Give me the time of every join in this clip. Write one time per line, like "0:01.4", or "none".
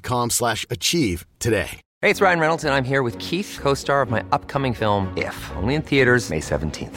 0:01.8